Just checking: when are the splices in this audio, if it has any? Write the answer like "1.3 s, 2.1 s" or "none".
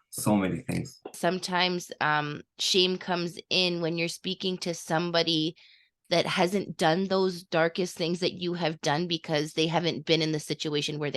1.1 s